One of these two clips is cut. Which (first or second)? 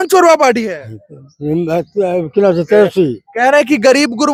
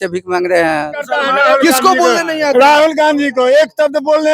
second